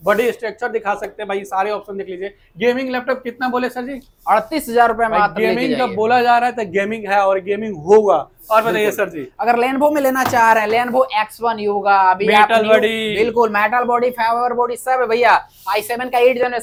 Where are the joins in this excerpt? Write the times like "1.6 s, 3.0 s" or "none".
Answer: none